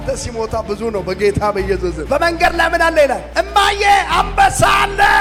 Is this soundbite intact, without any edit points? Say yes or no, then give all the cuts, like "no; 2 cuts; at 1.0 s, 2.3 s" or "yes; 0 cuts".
yes; 0 cuts